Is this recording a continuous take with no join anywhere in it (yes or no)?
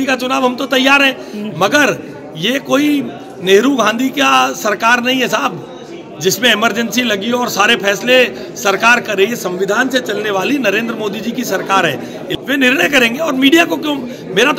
no